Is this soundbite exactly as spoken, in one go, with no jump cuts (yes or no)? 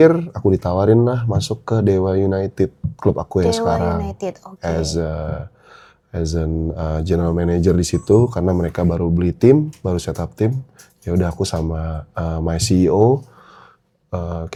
yes